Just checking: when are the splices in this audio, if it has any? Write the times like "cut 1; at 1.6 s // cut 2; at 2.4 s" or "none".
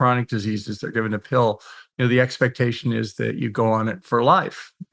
none